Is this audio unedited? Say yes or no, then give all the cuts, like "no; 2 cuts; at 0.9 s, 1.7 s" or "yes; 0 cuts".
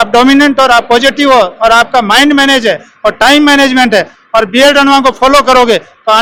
yes; 0 cuts